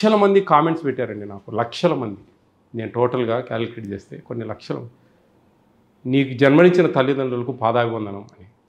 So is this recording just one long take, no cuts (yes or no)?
yes